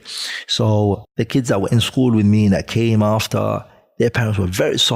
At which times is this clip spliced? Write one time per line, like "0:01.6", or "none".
0:01.1